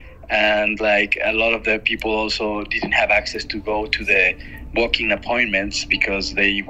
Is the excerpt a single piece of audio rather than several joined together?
yes; 0 cuts

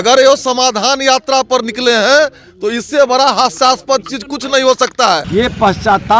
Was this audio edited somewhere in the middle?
yes; 1 cut; at 5.2 s

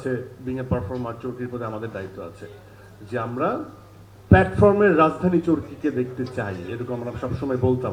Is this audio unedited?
yes; 0 cuts

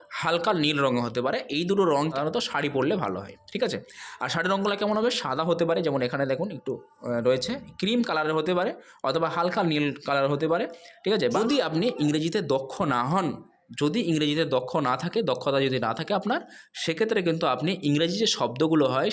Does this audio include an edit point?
yes; 2 cuts; at 2.1 s, 11.4 s

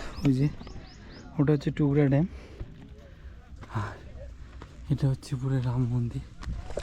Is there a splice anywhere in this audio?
no; 0 cuts

